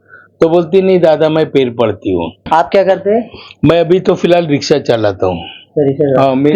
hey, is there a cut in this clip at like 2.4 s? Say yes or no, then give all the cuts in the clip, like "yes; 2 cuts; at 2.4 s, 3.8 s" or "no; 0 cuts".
yes; 1 cut; at 2.4 s